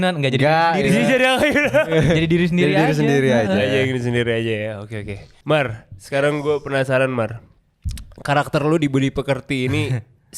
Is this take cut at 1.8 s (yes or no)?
no